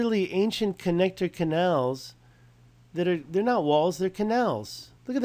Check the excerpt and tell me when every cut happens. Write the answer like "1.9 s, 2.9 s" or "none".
none